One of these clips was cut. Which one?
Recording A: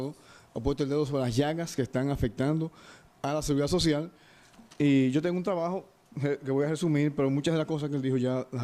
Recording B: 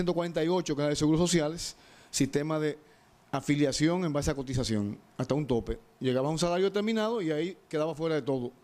B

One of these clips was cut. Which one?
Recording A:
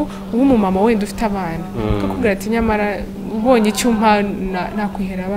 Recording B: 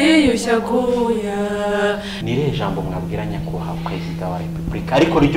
B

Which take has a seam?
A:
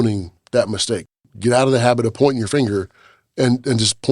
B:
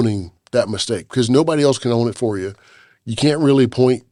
A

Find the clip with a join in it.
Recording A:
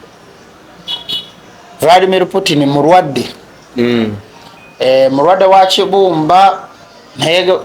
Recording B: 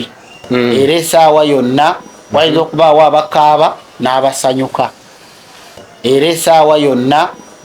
B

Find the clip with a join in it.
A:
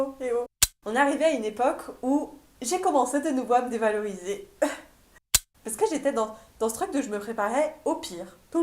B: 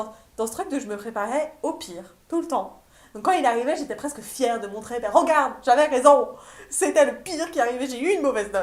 A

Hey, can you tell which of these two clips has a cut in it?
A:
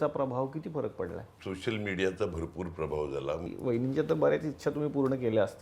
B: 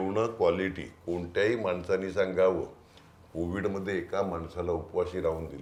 A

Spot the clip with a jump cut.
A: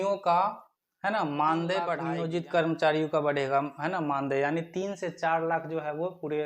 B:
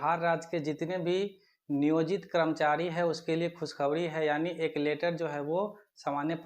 A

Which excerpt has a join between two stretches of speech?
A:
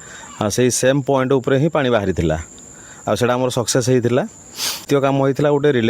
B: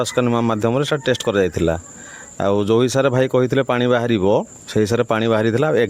A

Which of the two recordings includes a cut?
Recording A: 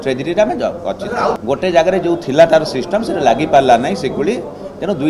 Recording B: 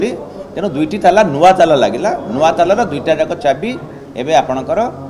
A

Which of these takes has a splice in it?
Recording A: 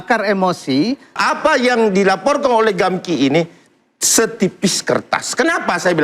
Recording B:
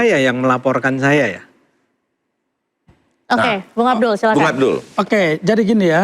A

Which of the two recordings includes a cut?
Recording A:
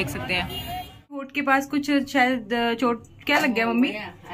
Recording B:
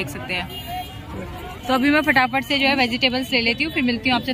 A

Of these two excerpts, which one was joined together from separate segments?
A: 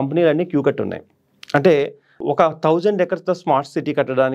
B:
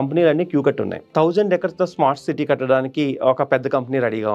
B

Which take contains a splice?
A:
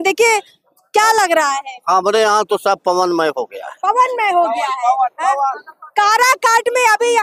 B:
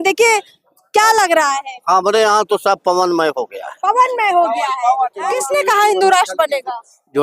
B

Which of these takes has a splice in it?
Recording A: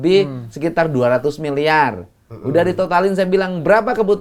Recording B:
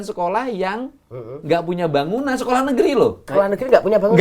B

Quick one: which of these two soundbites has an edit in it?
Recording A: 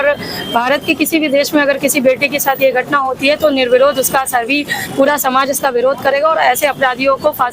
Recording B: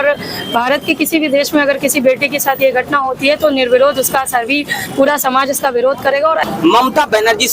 B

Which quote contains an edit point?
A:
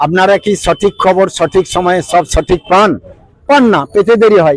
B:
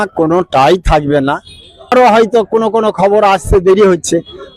B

